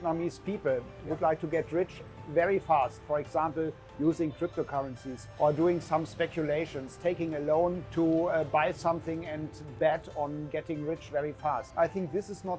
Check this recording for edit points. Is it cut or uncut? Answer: cut